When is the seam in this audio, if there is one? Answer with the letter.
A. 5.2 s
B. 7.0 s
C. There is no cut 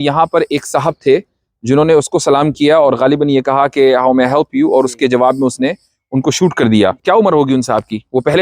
B